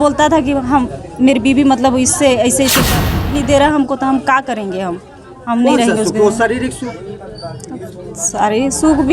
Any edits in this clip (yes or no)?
yes